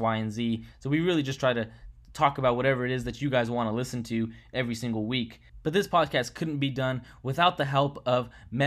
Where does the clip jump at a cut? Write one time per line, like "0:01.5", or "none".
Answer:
0:05.4